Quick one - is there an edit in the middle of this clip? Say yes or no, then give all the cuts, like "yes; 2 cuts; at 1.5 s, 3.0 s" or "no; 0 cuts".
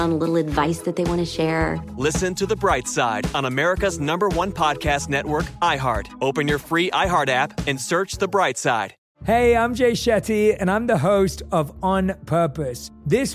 yes; 1 cut; at 9.0 s